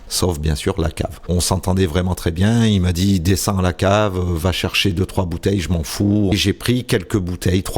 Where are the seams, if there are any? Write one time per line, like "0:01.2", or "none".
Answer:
0:01.2
0:06.3